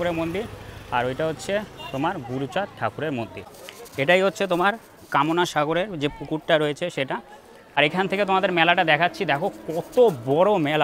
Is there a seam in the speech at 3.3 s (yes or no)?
yes